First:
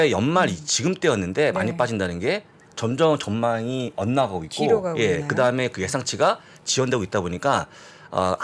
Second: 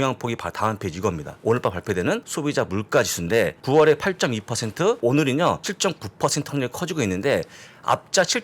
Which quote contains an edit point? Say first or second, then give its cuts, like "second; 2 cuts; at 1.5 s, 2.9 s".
second; 5 cuts; at 1.3 s, 2.3 s, 3.6 s, 5.0 s, 5.7 s